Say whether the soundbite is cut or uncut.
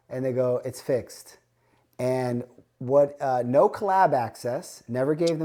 uncut